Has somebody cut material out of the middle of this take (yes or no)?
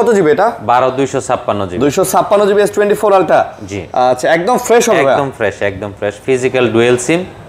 no